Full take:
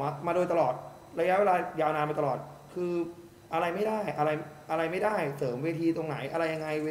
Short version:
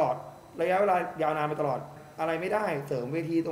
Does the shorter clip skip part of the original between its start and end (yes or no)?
yes